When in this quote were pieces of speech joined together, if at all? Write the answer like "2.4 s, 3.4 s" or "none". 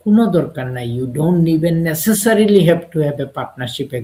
none